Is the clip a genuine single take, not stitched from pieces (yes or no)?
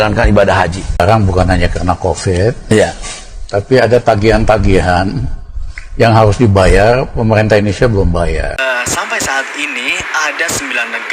no